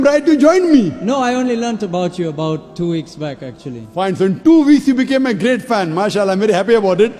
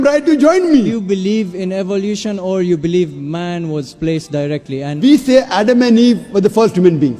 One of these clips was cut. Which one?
second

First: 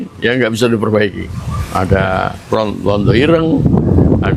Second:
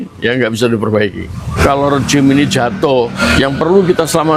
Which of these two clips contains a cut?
second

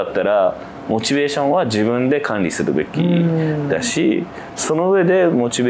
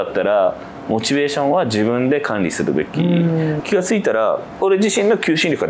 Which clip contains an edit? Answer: second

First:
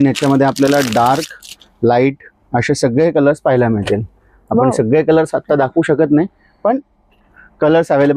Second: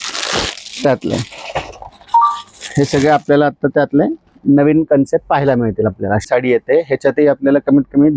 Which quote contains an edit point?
second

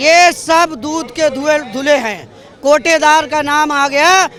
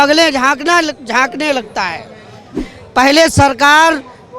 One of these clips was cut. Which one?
second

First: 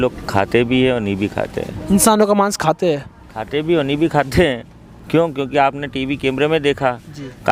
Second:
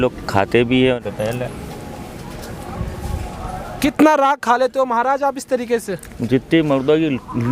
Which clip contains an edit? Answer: second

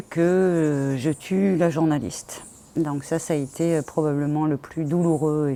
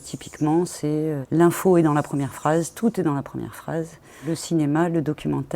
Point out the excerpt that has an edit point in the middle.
second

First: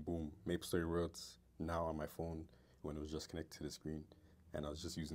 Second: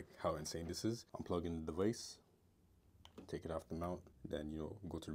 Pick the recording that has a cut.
second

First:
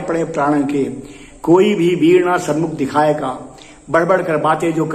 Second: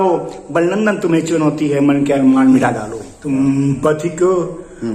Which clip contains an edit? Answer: second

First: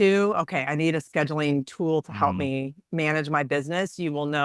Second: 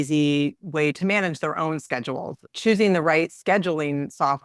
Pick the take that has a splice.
second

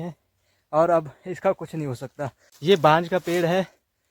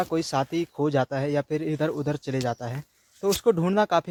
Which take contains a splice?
first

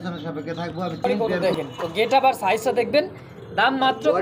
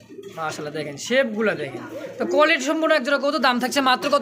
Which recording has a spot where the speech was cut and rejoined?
first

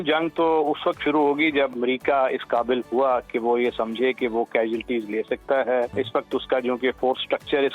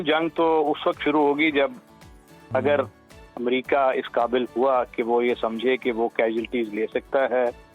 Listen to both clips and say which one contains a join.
first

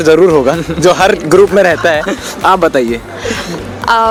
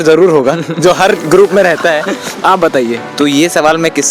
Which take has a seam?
second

